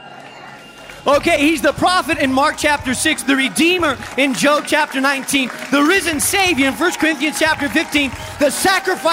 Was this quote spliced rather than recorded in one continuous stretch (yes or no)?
yes